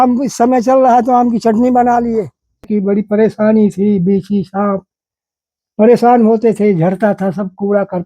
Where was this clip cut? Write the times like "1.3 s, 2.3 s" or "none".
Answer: 2.7 s